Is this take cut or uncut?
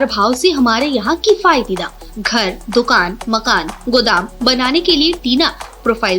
uncut